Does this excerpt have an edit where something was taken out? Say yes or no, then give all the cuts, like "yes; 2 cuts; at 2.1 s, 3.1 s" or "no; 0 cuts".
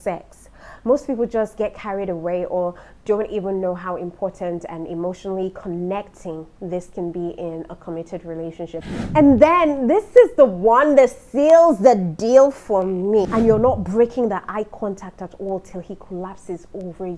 yes; 2 cuts; at 8.8 s, 13.3 s